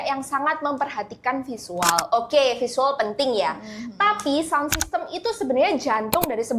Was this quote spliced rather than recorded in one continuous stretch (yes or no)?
no